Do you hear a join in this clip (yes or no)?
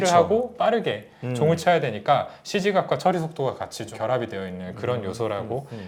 no